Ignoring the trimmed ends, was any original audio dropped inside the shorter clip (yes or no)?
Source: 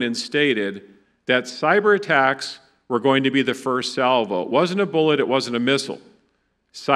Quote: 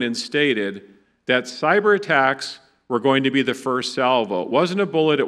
no